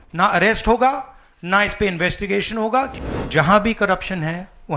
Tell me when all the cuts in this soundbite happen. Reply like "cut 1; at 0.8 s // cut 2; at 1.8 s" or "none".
cut 1; at 3.0 s